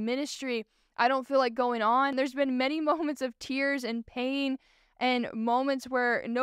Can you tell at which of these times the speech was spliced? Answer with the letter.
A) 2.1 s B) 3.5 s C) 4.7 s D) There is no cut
A